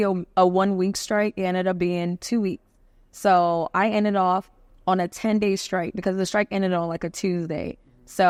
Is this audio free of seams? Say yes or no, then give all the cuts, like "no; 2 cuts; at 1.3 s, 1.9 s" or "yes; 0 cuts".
yes; 0 cuts